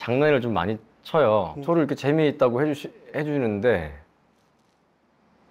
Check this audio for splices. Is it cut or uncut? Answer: cut